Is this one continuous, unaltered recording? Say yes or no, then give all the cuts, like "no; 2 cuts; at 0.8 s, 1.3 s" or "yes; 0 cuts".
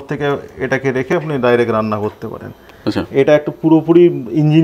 yes; 0 cuts